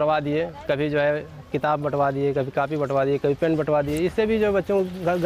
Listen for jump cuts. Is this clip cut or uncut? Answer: uncut